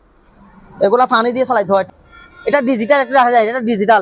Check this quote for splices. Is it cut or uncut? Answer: cut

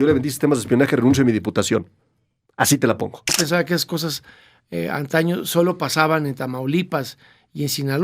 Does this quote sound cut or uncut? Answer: cut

